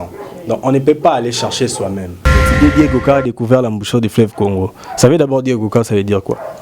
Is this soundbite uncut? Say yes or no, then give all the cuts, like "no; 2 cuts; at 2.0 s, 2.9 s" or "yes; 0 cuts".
no; 1 cut; at 2.5 s